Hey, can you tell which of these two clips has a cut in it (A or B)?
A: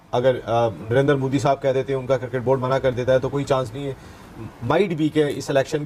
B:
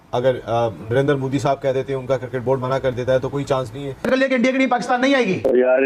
B